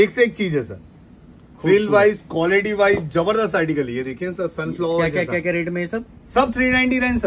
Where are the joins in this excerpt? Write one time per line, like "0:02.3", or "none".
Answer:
none